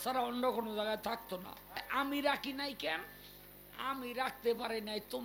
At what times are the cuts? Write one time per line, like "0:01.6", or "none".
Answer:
0:01.8